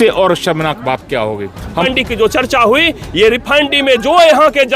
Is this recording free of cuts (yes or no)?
no